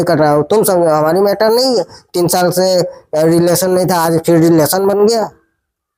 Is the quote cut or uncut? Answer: uncut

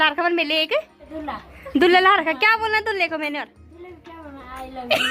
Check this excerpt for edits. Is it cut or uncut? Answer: cut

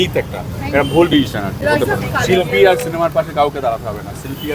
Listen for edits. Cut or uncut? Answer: cut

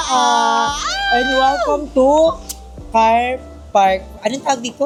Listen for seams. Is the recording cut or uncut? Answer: uncut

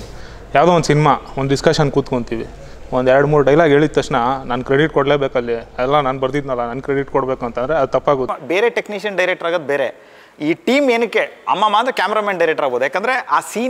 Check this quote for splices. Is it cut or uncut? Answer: cut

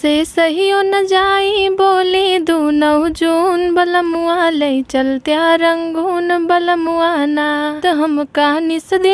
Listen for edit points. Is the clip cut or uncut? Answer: cut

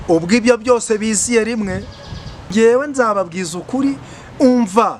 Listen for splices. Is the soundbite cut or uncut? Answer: cut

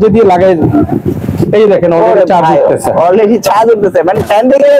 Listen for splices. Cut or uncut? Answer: uncut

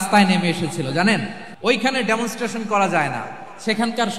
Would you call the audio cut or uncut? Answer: cut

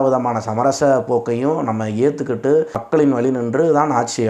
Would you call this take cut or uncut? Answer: cut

